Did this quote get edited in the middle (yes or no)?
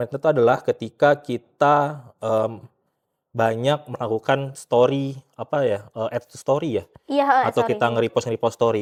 no